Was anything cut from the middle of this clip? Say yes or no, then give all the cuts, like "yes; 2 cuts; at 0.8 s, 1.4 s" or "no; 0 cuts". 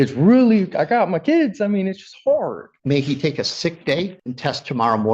yes; 2 cuts; at 2.7 s, 4.2 s